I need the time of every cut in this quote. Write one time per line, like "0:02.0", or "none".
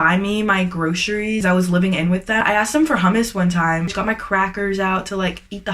0:01.4
0:02.4
0:03.9

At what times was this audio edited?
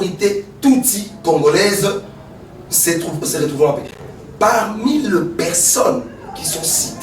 0:03.9

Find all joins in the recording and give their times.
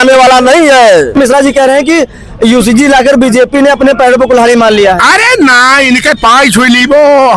0:01.1

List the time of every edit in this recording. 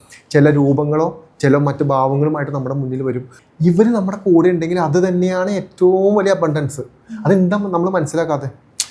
0:03.3

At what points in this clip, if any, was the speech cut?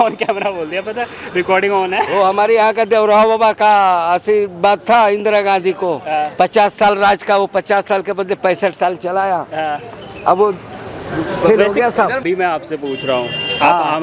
0:12.2

